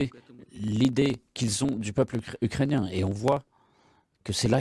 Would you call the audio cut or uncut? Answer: cut